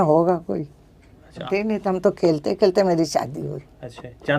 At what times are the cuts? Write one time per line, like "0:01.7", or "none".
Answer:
0:01.4

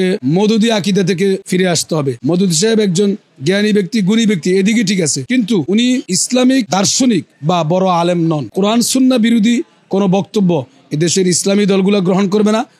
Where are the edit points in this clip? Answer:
0:02.2
0:08.5

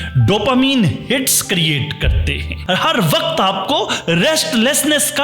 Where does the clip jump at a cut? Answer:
0:02.7

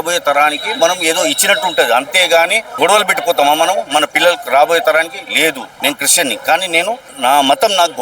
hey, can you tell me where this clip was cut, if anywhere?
0:02.6
0:05.7
0:07.1

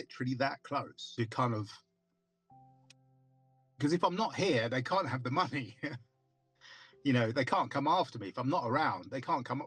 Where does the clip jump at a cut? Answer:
0:01.0

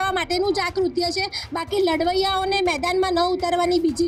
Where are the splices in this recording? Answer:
none

